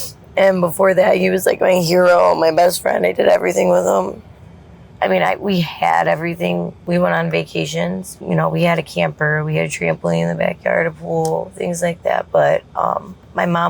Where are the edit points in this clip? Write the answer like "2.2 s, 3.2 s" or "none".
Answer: 4.8 s, 6.8 s, 8.1 s